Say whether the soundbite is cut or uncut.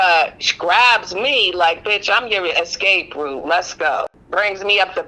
cut